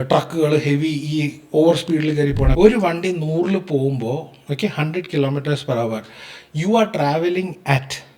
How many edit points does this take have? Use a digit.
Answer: 1